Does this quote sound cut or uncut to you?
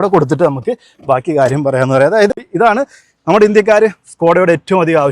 cut